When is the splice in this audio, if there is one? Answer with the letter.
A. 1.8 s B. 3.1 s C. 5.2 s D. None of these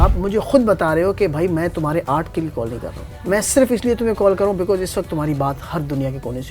B